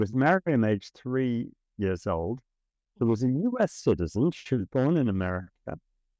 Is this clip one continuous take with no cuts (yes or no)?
yes